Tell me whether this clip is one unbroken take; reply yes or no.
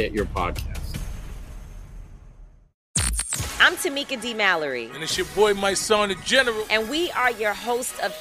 no